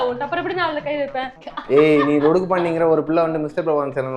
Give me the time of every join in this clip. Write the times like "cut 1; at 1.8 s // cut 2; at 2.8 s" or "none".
cut 1; at 1.4 s